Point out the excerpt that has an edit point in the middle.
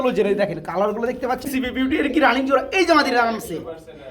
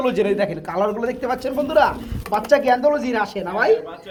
first; 1 cut; at 1.5 s

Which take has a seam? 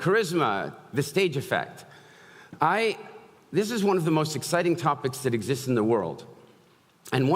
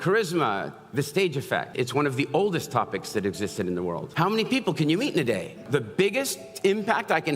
second; 3 cuts; at 1.7 s, 4.0 s, 5.7 s

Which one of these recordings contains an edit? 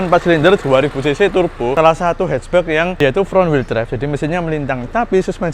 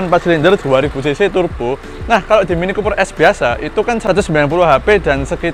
first; 2 cuts; at 1.7 s, 2.9 s

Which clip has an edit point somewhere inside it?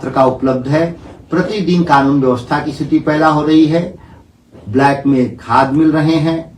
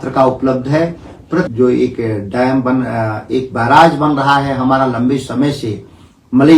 second; 1 cut; at 1.5 s

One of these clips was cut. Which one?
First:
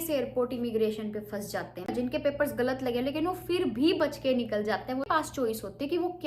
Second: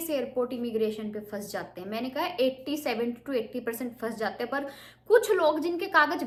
first; 2 cuts; at 1.9 s, 5.1 s

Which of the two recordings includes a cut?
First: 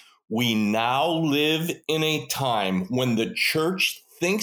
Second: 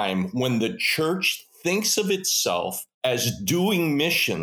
second; 1 cut; at 2.8 s

